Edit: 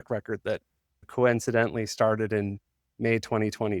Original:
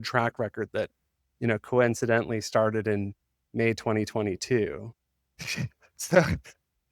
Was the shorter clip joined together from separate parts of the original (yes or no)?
yes